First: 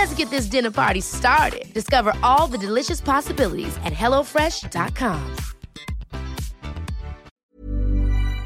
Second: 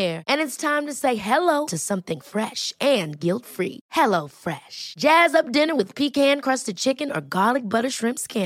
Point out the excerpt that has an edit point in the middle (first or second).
first